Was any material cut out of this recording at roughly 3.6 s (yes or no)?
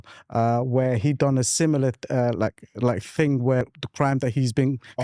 yes